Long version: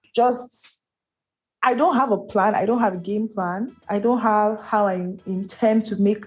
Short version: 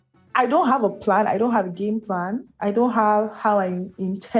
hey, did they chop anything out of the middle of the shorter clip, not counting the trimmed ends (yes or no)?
no